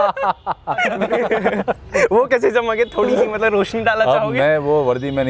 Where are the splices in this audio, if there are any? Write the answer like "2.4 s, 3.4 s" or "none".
1.0 s